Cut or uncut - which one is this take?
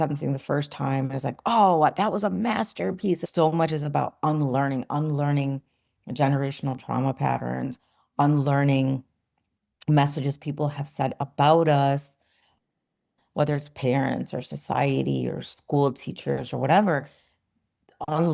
cut